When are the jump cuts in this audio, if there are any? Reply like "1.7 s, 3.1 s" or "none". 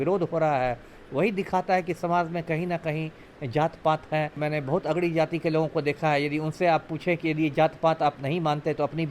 4.4 s